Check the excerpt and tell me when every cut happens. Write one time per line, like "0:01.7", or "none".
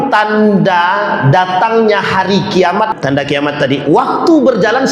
0:02.9